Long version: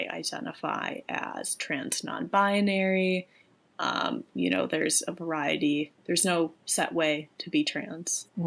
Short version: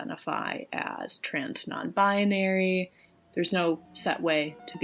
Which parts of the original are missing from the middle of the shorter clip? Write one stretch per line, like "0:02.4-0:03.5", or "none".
0:03.6-0:06.0